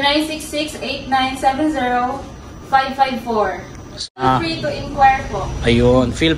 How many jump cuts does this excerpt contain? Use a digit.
1